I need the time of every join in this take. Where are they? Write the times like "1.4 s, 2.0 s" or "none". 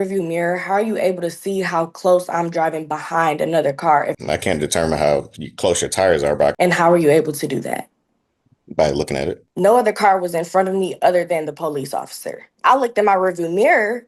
4.2 s, 6.6 s, 9.4 s, 12.5 s